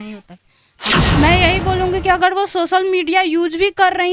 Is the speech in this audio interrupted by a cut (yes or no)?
yes